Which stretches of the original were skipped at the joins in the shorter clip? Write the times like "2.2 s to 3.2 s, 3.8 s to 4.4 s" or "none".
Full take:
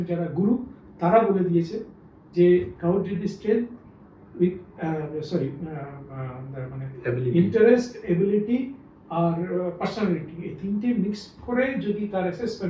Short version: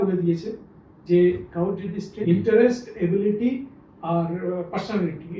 3.5 s to 7.3 s